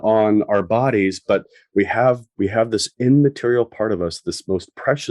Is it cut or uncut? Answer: uncut